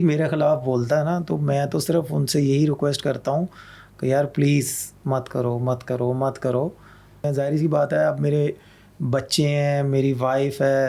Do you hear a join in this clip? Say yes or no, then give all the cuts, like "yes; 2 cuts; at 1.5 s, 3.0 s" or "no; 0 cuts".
yes; 1 cut; at 7.2 s